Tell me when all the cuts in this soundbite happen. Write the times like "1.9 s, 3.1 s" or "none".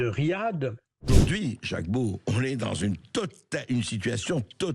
1.1 s